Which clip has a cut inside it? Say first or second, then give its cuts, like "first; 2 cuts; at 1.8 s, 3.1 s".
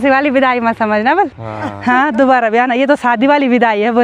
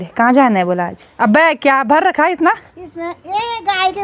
second; 1 cut; at 1.0 s